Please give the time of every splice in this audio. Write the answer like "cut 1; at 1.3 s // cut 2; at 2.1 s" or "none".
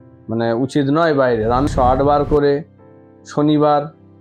cut 1; at 1.7 s